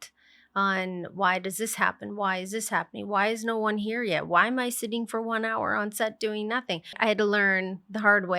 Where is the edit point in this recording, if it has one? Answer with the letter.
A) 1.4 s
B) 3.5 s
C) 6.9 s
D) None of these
C